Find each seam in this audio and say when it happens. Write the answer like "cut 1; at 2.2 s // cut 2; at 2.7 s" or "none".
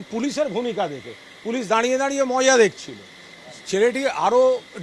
none